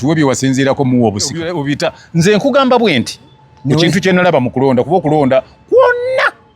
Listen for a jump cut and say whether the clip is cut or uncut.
cut